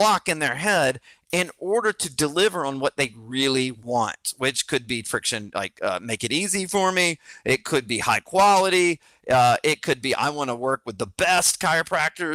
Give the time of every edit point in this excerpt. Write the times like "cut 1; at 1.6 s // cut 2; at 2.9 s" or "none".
none